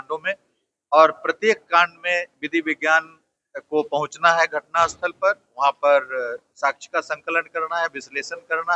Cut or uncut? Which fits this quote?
uncut